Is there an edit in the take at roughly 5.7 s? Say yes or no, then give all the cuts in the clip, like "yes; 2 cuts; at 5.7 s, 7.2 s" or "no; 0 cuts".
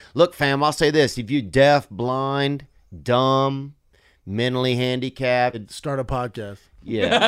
yes; 1 cut; at 5.7 s